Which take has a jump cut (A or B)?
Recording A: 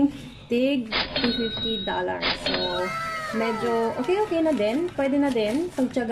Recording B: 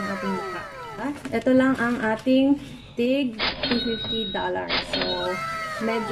B